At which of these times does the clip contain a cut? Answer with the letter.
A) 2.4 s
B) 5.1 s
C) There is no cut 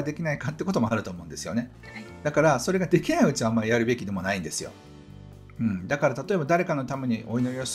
C